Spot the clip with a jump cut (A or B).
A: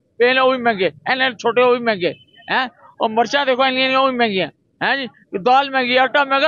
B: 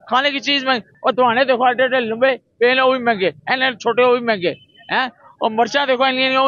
B